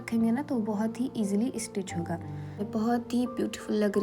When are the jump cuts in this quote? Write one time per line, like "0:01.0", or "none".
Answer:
0:02.7